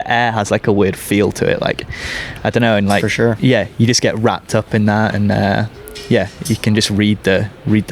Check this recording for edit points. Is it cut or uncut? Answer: uncut